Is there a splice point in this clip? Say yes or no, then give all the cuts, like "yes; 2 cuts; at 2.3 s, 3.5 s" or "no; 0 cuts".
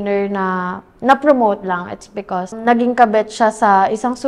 yes; 1 cut; at 2.6 s